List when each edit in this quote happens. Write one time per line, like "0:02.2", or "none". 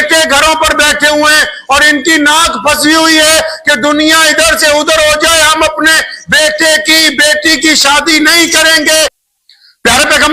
0:09.2